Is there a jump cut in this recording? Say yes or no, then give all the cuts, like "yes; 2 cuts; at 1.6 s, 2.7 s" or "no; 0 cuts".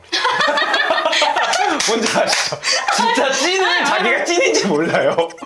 no; 0 cuts